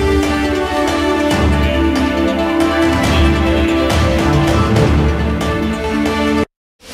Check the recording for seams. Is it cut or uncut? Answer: uncut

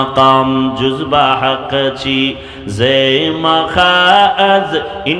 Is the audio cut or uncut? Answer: uncut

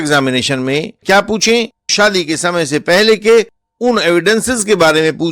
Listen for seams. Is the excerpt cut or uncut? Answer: cut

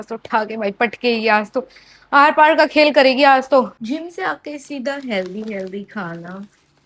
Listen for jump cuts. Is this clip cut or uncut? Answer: uncut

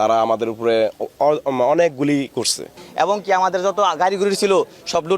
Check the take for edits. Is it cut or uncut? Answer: cut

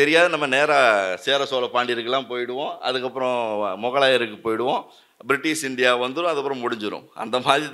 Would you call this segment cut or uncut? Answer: uncut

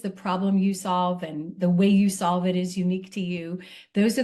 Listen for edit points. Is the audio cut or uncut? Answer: uncut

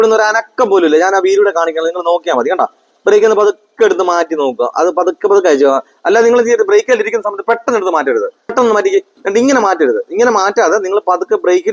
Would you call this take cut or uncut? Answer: cut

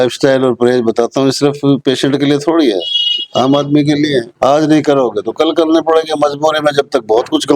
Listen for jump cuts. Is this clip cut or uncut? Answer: uncut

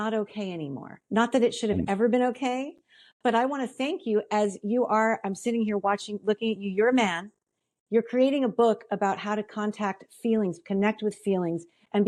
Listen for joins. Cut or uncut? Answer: uncut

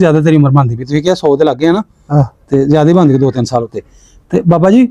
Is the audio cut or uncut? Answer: uncut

